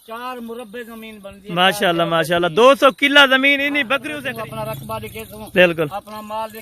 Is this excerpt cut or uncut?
cut